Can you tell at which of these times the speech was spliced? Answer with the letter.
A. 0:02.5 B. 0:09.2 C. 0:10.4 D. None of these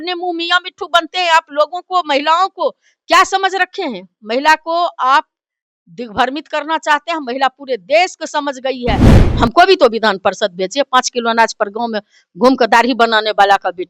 B